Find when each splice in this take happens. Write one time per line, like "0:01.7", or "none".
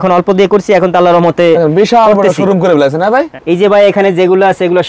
0:03.3